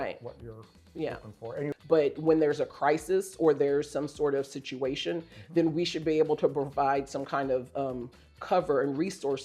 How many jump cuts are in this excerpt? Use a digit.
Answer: 1